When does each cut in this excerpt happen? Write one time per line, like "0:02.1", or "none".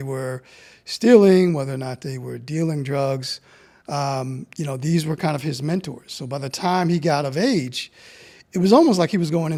none